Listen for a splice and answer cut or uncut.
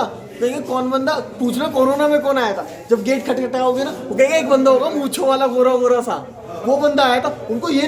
uncut